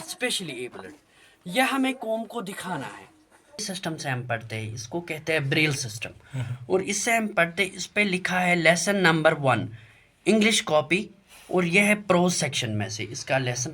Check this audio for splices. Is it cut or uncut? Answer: cut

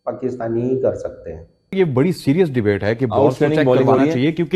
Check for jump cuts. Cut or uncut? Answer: cut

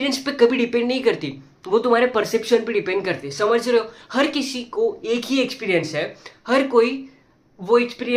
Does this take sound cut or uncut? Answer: uncut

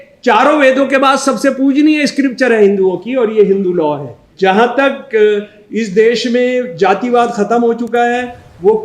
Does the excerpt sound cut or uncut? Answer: cut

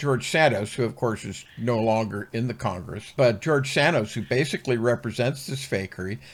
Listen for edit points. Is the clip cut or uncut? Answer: uncut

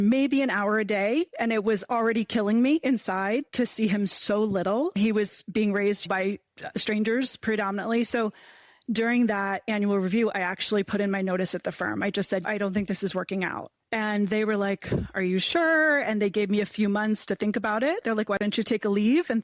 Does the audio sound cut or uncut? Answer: uncut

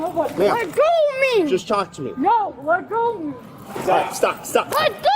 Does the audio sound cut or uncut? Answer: cut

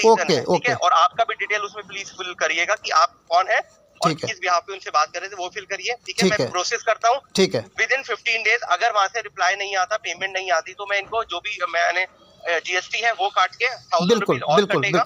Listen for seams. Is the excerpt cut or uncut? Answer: uncut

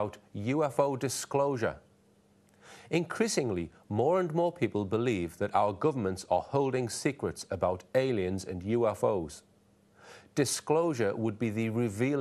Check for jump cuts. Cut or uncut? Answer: cut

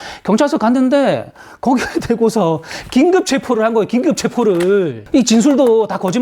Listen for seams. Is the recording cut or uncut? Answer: cut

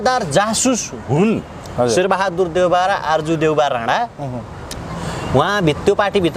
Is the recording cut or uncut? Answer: uncut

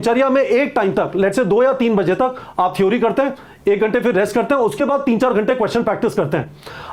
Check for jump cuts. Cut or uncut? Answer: uncut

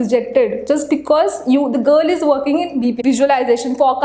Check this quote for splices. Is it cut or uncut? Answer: cut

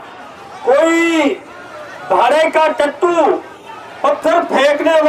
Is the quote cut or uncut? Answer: uncut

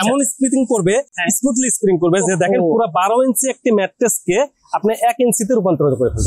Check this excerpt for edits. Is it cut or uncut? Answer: uncut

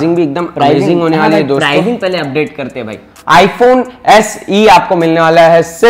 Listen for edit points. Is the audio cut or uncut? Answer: uncut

